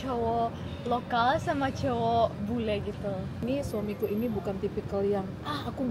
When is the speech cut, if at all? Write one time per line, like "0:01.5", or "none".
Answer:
0:03.4